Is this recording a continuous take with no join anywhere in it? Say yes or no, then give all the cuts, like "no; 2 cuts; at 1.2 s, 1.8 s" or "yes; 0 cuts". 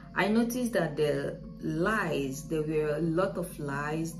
yes; 0 cuts